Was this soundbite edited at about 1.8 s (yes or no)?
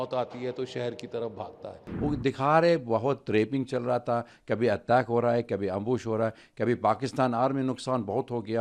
yes